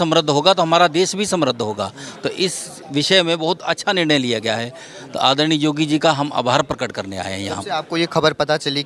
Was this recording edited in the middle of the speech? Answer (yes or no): no